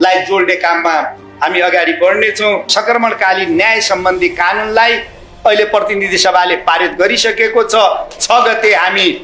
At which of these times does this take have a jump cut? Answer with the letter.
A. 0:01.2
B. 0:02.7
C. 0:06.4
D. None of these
B